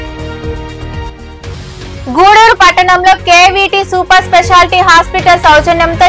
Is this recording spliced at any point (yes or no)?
no